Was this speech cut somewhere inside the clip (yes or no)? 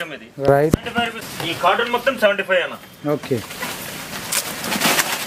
yes